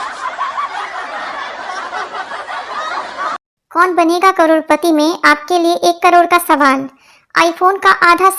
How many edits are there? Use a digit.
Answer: 1